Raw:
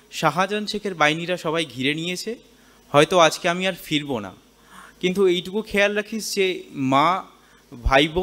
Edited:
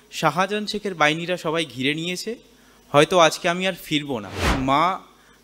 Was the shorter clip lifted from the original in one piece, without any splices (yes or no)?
no